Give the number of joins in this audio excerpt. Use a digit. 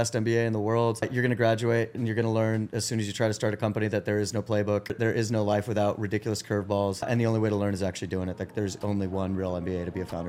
3